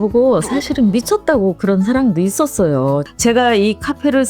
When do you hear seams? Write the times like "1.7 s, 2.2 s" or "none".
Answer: 3.0 s